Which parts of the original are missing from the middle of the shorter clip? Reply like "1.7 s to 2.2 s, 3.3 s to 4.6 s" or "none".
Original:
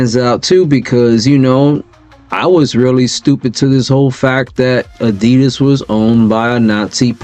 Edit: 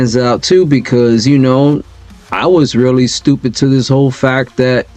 none

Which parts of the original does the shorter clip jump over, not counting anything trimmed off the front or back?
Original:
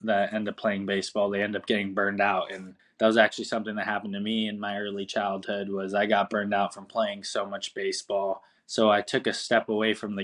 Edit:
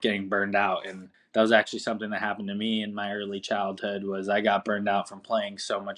none

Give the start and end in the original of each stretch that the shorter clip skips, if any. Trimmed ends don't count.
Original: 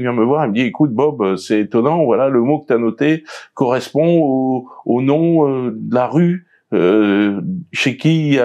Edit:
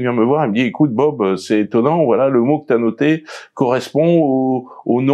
none

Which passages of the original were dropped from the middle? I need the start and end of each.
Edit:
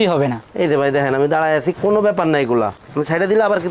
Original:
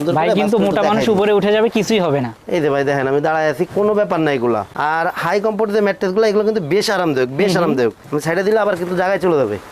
4.7 s to 8.0 s

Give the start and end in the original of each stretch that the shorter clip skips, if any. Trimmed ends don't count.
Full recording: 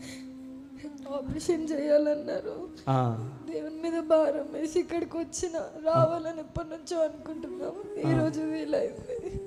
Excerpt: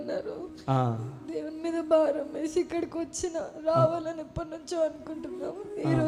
none

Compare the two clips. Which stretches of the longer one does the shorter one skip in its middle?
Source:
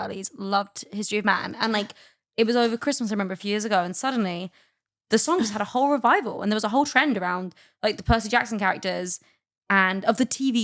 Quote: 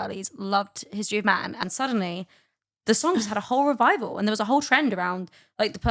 1.6 s to 3.9 s

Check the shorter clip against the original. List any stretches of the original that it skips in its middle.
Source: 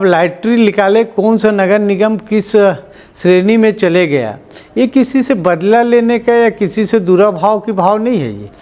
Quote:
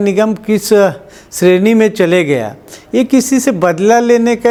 none

